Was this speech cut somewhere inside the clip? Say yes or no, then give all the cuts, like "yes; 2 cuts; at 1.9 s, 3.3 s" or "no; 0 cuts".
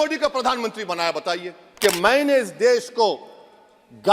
yes; 1 cut; at 1.6 s